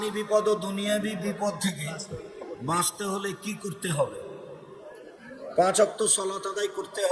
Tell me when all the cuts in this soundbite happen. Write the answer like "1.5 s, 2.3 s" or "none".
none